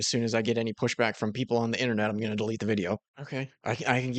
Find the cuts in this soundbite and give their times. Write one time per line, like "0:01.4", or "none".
0:03.2

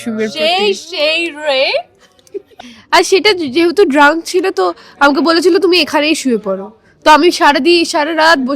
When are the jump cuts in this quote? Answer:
0:02.6

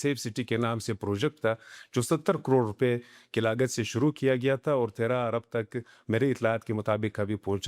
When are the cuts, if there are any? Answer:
none

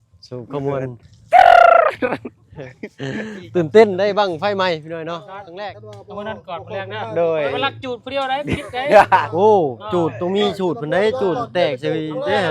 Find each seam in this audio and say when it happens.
0:05.5

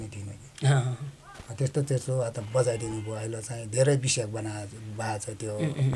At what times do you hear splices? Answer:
none

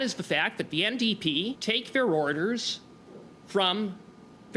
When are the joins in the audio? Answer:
0:01.6

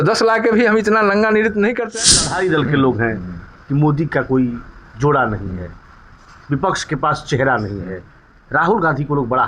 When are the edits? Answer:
0:01.8

